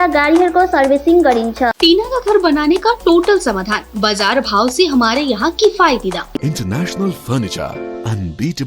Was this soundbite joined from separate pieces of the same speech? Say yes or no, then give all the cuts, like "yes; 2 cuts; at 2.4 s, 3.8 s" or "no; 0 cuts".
yes; 2 cuts; at 1.7 s, 6.4 s